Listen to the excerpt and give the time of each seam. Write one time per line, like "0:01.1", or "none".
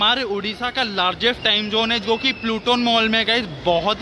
none